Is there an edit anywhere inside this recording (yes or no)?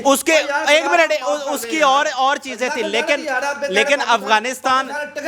no